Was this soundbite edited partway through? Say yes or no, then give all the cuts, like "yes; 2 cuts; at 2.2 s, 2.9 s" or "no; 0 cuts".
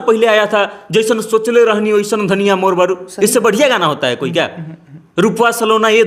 no; 0 cuts